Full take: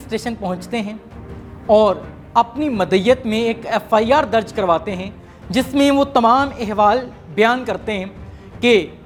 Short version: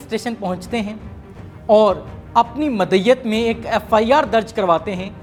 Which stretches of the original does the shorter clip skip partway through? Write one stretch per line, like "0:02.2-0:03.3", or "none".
none